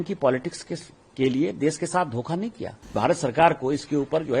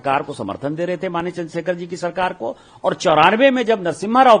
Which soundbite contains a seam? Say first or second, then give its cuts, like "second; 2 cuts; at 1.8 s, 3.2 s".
first; 1 cut; at 3.0 s